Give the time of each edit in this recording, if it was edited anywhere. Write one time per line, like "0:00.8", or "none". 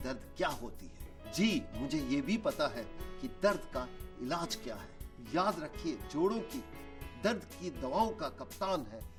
none